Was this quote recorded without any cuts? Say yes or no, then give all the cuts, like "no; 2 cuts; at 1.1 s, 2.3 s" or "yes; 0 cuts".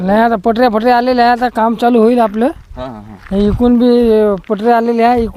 yes; 0 cuts